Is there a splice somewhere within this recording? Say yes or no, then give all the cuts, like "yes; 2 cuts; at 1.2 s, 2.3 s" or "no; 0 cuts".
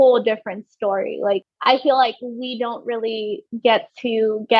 yes; 1 cut; at 1.5 s